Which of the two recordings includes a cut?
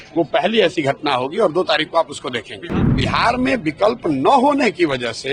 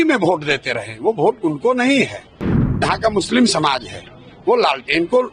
first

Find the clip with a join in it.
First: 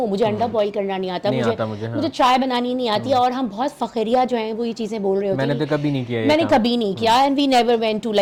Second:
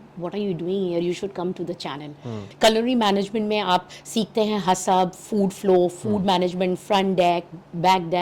second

